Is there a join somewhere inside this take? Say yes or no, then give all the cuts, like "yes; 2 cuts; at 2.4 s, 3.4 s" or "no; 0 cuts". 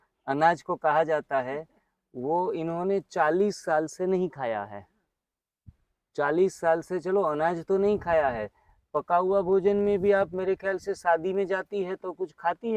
no; 0 cuts